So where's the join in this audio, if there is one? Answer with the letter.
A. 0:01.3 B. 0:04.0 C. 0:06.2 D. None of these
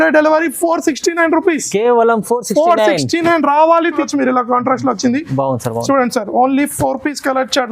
B